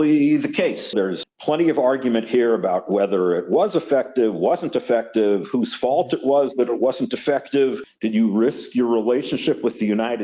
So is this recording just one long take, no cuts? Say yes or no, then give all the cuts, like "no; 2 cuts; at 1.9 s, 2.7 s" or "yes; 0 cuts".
no; 2 cuts; at 0.9 s, 7.9 s